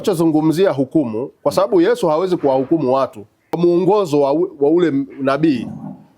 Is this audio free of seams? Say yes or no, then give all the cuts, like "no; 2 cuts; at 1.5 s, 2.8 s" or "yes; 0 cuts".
no; 1 cut; at 3.6 s